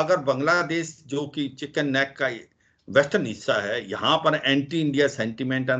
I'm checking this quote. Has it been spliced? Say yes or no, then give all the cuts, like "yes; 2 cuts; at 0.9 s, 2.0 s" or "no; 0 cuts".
no; 0 cuts